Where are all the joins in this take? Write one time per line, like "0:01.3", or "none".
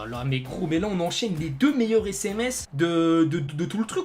none